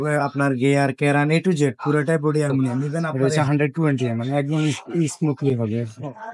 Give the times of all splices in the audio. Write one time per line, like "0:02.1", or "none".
0:03.1